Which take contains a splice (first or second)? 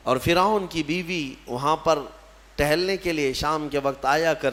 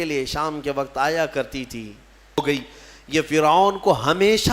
second